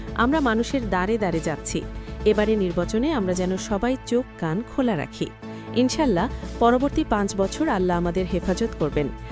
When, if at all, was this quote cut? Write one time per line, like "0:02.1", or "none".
none